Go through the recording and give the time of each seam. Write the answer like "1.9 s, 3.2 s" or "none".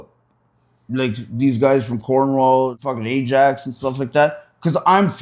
2.8 s